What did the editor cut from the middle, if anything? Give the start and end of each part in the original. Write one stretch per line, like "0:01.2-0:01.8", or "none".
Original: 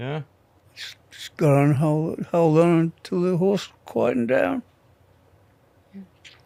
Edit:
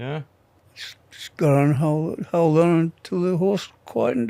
none